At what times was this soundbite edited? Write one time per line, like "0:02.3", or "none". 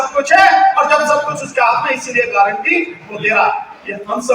none